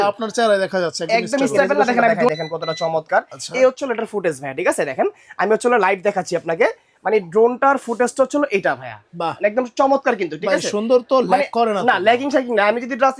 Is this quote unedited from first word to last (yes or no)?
no